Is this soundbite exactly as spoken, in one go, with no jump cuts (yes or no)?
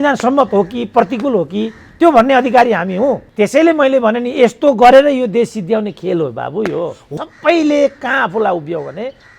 no